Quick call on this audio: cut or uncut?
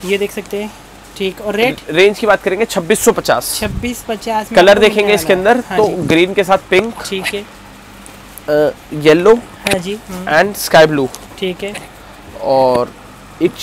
uncut